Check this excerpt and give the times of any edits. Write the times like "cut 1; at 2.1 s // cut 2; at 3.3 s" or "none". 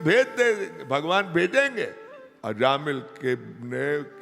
cut 1; at 2.1 s